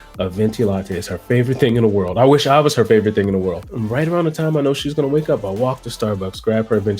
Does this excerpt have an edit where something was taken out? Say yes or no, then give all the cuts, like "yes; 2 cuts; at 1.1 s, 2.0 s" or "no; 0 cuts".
yes; 1 cut; at 3.7 s